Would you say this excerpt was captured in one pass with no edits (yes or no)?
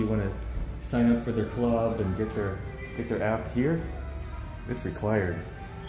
yes